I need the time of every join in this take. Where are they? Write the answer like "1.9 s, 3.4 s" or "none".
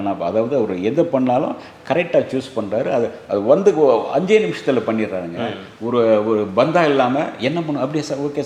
none